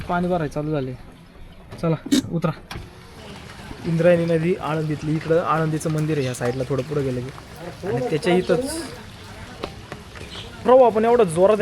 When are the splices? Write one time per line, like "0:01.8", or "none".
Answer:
0:03.1